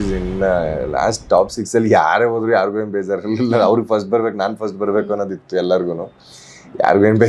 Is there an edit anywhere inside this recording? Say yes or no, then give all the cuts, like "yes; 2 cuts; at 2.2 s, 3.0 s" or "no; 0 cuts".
no; 0 cuts